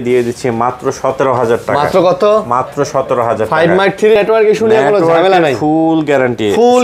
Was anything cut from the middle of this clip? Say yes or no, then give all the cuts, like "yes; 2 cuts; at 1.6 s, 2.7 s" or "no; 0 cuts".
yes; 1 cut; at 4.2 s